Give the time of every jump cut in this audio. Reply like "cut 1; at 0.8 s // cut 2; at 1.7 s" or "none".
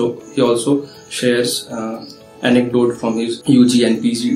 cut 1; at 3.4 s